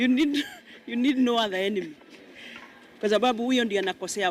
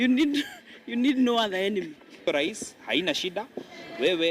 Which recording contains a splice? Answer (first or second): second